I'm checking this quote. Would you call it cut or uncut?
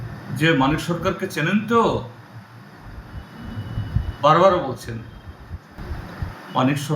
cut